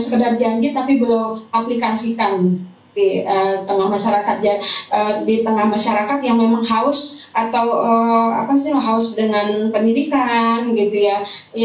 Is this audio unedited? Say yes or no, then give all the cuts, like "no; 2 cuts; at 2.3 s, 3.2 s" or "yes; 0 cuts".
yes; 0 cuts